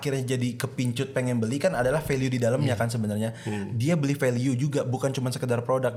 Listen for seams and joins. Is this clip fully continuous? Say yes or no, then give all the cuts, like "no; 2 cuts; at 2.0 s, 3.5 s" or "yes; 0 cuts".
yes; 0 cuts